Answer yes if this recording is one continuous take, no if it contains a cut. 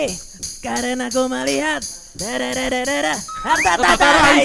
yes